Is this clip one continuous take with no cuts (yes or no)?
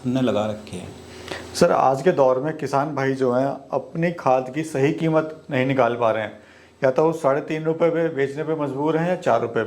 yes